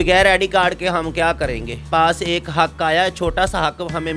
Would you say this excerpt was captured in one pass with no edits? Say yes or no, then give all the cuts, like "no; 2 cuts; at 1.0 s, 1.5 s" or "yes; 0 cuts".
no; 1 cut; at 1.8 s